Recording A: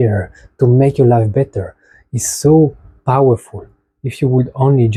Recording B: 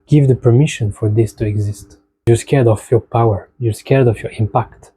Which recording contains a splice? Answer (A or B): B